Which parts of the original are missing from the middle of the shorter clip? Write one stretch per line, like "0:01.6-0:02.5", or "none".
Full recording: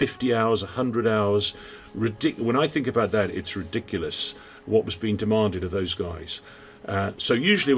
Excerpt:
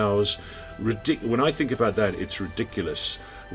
none

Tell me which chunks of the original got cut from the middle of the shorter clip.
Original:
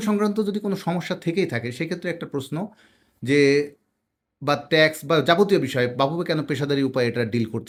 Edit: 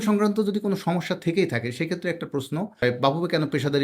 0:02.8-0:05.7

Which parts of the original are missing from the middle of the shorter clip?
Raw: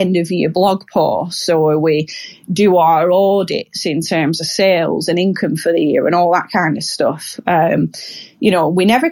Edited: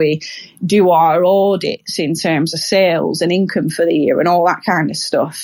none

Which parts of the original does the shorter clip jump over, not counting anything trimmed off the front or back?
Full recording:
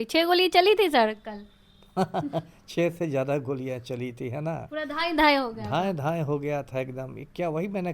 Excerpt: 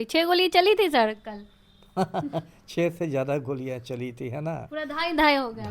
none

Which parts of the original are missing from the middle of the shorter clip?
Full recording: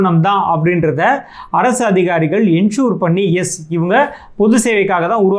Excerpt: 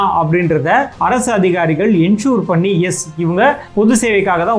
0:01.2-0:01.4
0:04.2-0:04.3

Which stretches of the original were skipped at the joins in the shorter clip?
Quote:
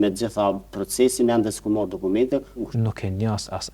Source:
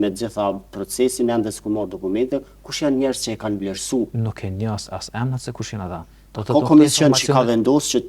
0:02.7-0:04.1

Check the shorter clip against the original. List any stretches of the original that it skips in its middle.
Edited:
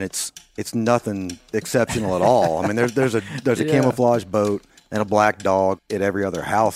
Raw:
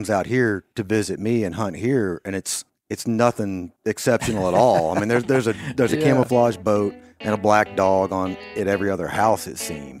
0:08.1-0:08.4

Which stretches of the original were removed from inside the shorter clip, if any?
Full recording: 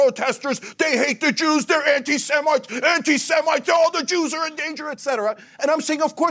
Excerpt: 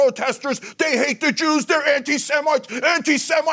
none

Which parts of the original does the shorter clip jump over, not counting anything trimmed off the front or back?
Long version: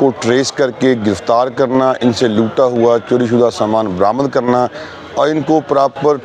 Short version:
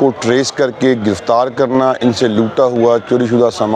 none

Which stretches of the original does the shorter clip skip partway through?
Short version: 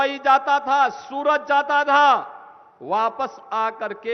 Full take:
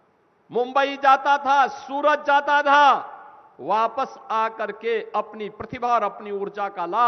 none

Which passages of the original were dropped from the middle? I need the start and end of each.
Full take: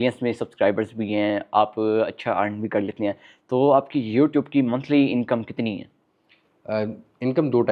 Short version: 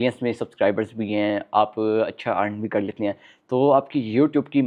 none

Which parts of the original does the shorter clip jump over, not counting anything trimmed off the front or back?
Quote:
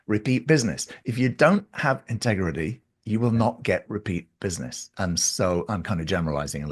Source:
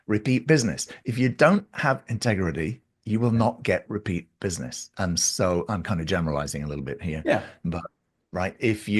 none

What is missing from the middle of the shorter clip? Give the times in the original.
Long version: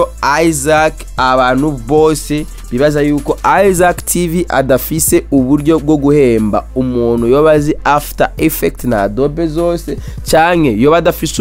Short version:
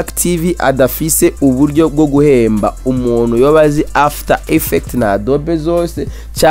none

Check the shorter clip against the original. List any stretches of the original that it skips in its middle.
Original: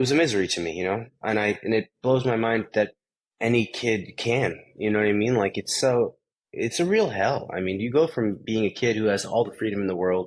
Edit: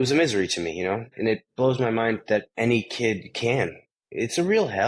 0:01.1-0:01.6
0:03.0-0:03.3
0:04.7-0:06.3

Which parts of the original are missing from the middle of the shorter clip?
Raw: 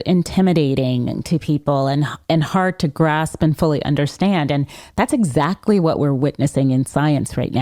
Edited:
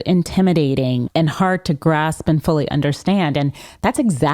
0:01.1-0:02.2

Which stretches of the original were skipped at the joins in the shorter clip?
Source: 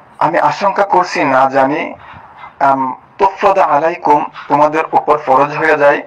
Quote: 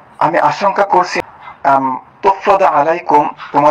0:01.1-0:02.1

